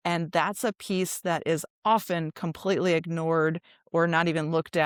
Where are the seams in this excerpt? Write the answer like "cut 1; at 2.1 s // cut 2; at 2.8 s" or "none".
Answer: none